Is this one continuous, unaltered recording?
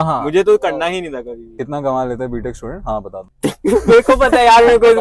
no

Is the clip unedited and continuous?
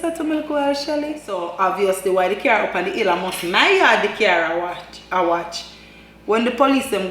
no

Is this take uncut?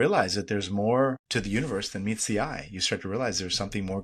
no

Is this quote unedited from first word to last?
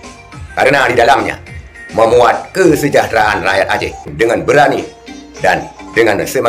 no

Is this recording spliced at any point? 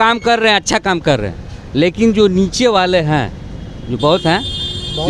no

